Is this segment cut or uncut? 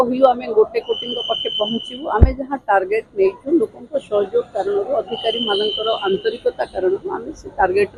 uncut